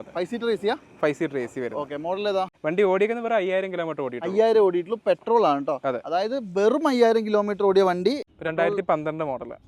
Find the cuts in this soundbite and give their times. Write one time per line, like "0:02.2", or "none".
0:02.5
0:08.3